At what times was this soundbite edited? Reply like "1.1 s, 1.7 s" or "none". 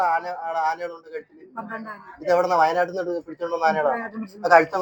none